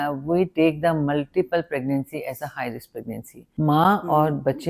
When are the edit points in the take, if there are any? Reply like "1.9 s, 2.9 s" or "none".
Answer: 3.4 s